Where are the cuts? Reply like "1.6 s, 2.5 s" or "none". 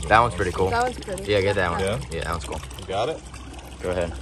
none